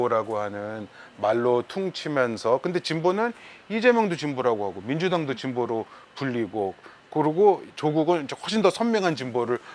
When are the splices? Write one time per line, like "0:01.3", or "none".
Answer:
none